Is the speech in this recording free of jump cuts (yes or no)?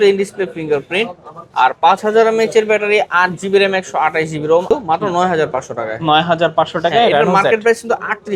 no